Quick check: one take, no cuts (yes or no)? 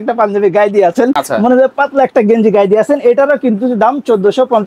yes